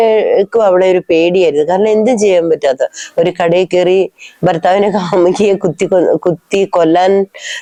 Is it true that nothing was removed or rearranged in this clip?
yes; 0 cuts

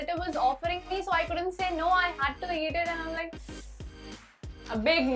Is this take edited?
no; 0 cuts

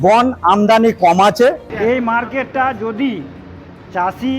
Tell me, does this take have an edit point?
yes; 1 cut; at 1.7 s

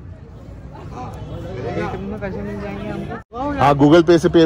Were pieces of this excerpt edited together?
yes; 1 cut; at 3.4 s

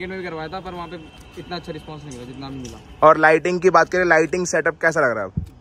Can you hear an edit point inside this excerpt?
no; 0 cuts

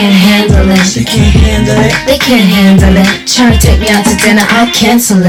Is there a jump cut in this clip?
no; 0 cuts

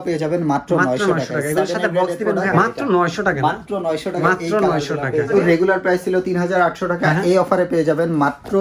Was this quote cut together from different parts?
yes; 3 cuts; at 2.5 s, 4.2 s, 5.3 s

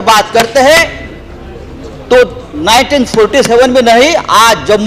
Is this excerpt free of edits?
yes; 0 cuts

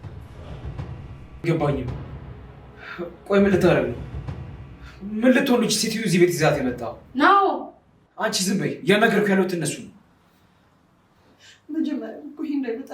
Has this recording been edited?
yes; 1 cut; at 1.4 s

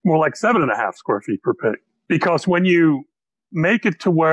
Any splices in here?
yes; 1 cut; at 1.9 s

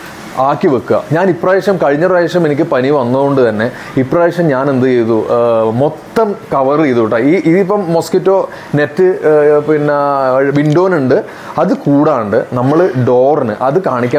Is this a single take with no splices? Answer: yes; 0 cuts

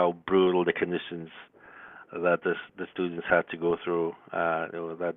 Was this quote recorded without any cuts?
yes; 0 cuts

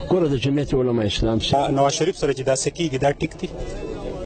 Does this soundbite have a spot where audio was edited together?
yes; 1 cut; at 1.5 s

